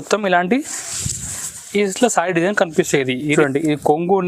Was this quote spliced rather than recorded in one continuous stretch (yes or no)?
yes